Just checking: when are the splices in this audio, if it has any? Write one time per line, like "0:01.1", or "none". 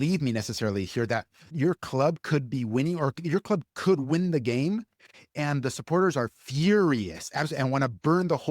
0:01.5